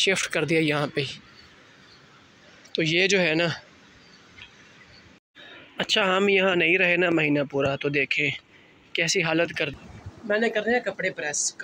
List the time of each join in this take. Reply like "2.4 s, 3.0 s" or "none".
5.3 s, 9.7 s